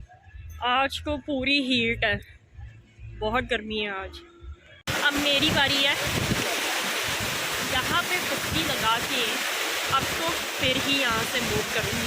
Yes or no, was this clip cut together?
yes